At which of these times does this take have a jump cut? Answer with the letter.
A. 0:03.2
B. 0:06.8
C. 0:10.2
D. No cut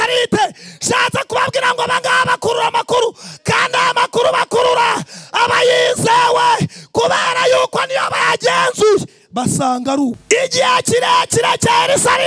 C